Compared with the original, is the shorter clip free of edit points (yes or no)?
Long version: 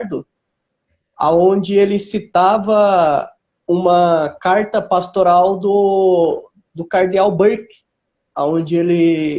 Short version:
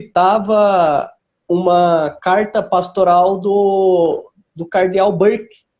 yes